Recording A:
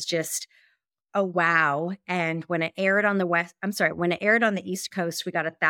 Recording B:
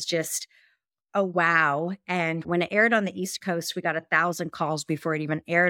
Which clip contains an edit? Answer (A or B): B